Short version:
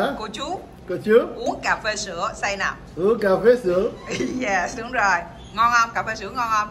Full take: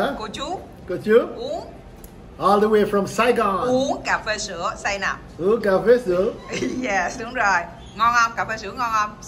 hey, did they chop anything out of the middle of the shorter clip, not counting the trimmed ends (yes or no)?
yes